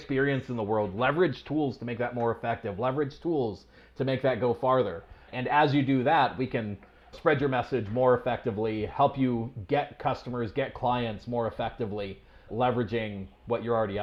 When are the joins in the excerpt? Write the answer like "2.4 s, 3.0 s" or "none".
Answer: none